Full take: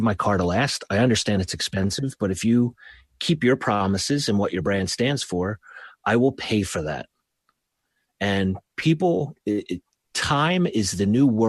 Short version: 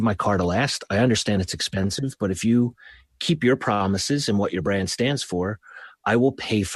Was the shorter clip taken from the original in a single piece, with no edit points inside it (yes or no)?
yes